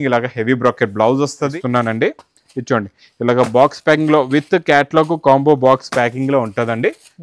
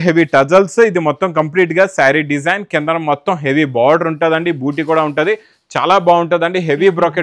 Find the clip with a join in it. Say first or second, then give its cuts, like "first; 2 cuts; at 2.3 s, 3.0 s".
first; 1 cut; at 1.6 s